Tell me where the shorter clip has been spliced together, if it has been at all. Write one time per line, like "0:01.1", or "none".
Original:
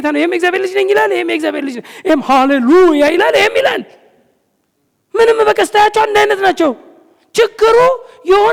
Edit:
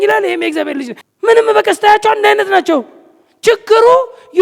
0:01.0